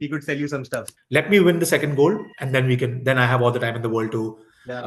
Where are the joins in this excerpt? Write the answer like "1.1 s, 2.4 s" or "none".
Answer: 1.0 s